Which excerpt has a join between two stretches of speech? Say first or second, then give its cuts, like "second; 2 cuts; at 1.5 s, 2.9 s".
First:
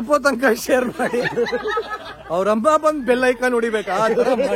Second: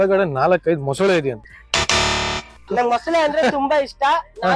second; 1 cut; at 2.6 s